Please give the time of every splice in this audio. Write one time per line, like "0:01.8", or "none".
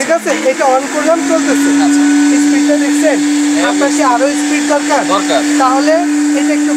none